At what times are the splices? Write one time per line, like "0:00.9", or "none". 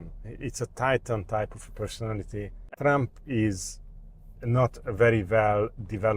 0:02.7